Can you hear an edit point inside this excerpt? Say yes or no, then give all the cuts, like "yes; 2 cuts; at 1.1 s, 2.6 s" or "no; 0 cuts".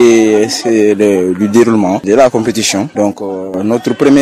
yes; 2 cuts; at 2.0 s, 2.9 s